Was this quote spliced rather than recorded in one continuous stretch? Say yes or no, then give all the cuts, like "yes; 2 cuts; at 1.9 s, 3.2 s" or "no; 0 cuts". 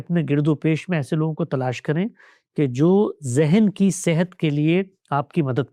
no; 0 cuts